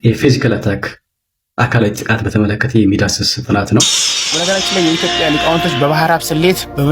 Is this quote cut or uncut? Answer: cut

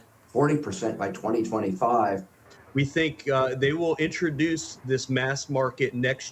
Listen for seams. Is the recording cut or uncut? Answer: cut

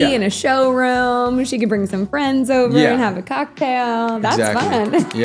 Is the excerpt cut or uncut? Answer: uncut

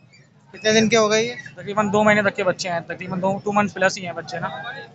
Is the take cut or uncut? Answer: uncut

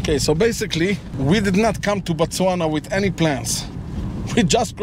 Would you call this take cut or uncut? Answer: cut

